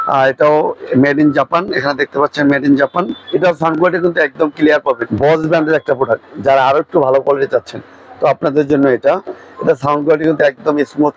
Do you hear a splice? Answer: yes; 2 cuts; at 3.2 s, 5.1 s

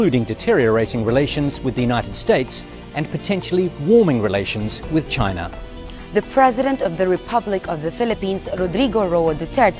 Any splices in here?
no; 0 cuts

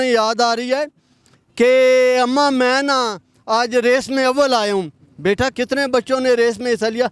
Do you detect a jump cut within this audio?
yes; 1 cut; at 5.5 s

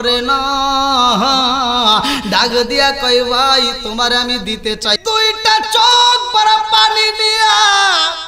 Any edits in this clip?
yes; 1 cut; at 5.0 s

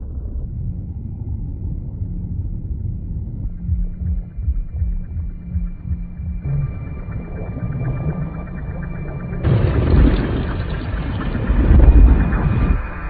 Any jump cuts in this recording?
yes; 1 cut; at 3.5 s

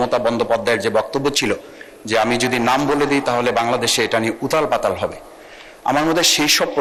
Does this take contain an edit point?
no; 0 cuts

